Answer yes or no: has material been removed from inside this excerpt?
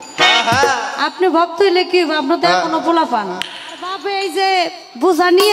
yes